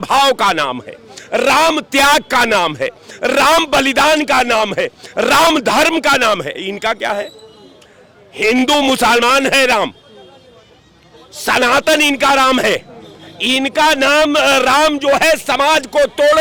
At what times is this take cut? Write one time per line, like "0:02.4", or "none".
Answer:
none